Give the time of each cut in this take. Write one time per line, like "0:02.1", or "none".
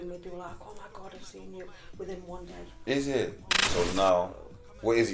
0:03.6